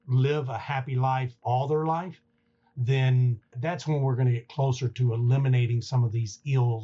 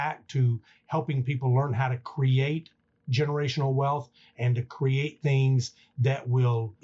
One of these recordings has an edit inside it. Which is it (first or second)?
first